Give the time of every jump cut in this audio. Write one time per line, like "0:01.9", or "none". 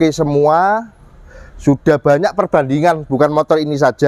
none